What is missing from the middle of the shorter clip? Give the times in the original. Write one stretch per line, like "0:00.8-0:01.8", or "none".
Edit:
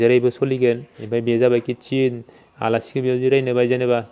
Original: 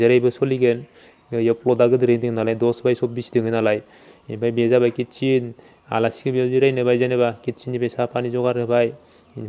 0:00.9-0:04.2